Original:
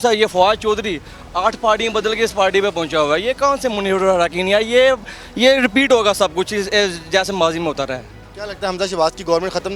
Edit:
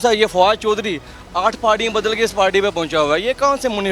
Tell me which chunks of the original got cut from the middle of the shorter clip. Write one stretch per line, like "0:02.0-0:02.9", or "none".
none